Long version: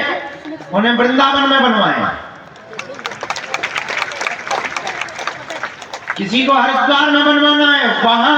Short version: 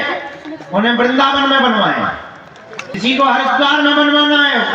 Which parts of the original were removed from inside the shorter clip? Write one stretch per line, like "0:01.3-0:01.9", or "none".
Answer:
0:02.9-0:06.1